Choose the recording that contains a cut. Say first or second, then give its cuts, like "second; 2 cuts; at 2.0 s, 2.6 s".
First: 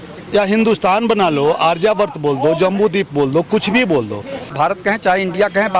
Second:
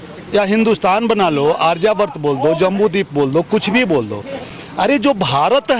first; 1 cut; at 4.5 s